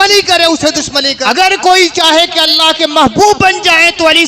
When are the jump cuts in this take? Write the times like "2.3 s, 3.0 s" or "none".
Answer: 1.2 s